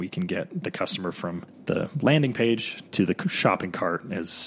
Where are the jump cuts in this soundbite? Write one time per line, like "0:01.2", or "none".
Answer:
0:01.5